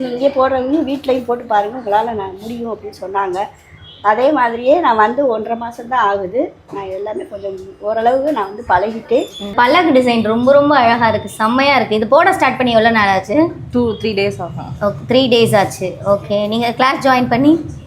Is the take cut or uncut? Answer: cut